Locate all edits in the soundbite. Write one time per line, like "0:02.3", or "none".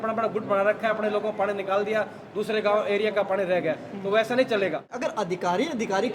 0:05.0